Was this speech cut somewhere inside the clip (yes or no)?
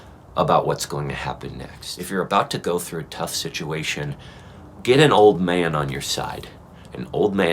yes